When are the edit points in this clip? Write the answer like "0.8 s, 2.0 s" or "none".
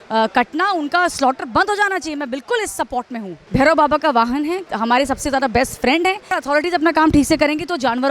3.4 s, 4.7 s, 6.3 s